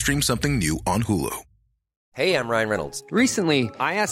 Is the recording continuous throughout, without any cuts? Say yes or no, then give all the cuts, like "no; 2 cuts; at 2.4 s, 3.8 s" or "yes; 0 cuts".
no; 1 cut; at 2.0 s